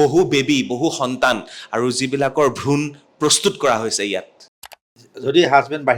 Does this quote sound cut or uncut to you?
cut